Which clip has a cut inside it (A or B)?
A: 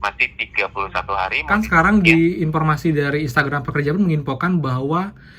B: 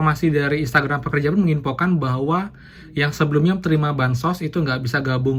A